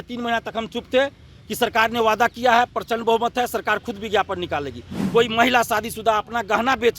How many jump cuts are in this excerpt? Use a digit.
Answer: 1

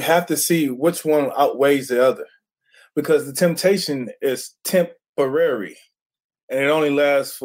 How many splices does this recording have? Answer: 0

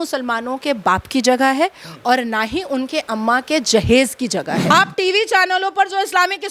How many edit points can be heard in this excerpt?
1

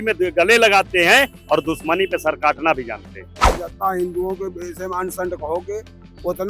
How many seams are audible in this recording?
1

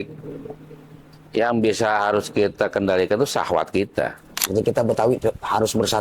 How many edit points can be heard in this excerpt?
1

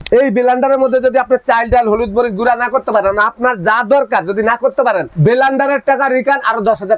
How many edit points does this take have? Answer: 1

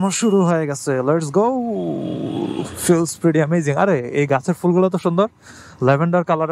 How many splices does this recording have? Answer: 0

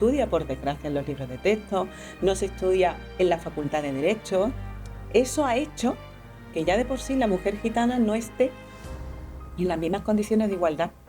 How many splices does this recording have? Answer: 1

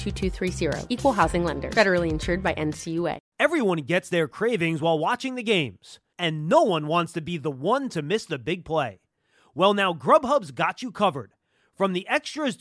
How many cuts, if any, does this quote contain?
1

